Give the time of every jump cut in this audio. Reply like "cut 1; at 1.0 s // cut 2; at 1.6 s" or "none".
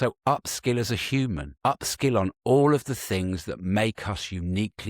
cut 1; at 1.5 s